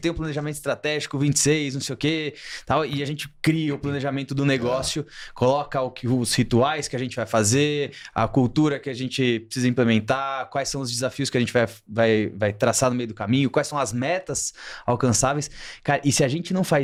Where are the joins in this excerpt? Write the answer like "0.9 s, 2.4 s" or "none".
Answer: none